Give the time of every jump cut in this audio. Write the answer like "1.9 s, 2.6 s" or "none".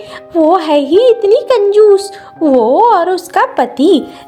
none